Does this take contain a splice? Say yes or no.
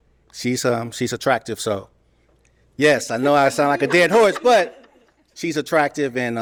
no